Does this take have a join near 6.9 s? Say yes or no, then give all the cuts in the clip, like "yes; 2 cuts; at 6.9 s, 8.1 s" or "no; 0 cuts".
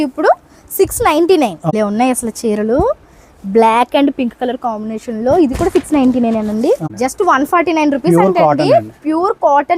yes; 2 cuts; at 1.7 s, 6.9 s